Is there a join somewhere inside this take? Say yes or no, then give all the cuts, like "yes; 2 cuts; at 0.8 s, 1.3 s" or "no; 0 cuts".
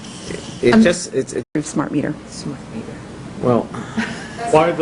no; 0 cuts